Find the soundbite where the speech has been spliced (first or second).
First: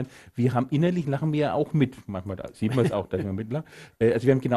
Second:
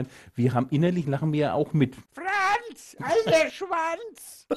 second